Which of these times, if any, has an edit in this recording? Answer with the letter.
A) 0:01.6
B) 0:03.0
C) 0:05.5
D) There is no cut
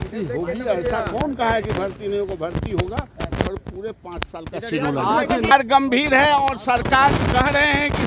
C